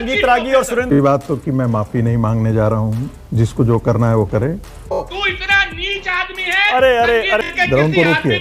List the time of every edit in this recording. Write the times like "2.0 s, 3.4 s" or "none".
1.0 s, 5.0 s, 7.5 s